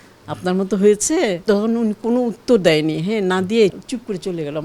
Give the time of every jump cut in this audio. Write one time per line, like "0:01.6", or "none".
0:01.4
0:03.8